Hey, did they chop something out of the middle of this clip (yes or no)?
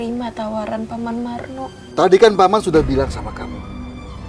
yes